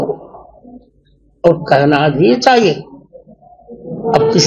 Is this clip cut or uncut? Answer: uncut